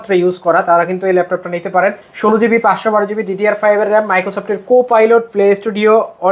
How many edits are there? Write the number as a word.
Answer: one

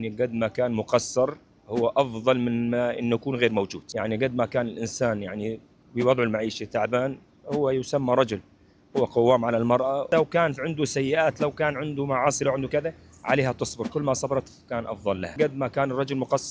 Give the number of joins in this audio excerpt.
three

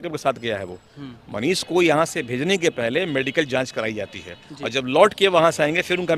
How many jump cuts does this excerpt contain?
zero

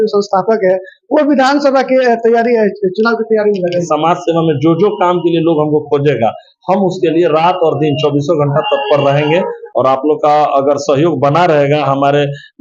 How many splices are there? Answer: two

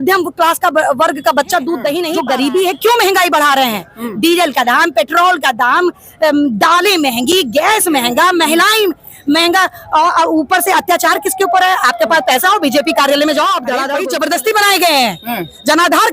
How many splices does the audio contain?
two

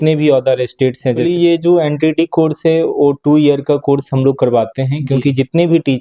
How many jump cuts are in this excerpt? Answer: one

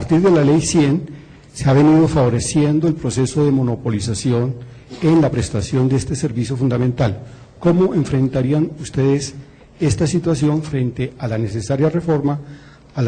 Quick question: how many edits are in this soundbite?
one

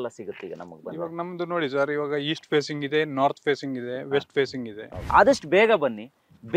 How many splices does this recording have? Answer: one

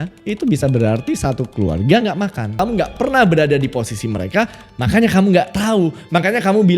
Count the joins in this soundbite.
one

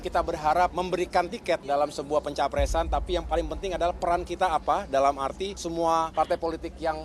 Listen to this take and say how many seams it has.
two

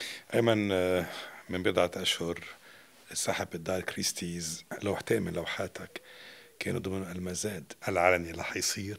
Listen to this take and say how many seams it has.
one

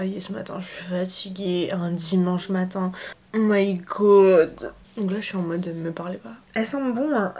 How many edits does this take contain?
one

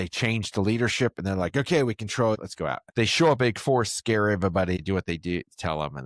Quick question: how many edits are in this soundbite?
two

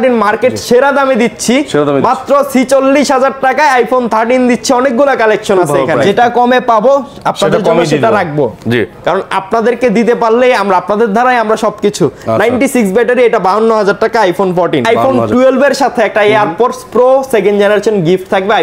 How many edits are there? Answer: two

